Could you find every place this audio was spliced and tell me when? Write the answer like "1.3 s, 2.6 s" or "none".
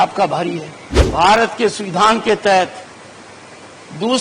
1.1 s